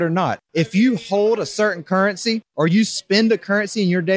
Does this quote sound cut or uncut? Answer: uncut